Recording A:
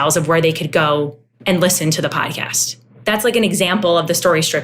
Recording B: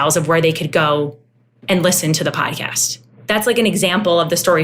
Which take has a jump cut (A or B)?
A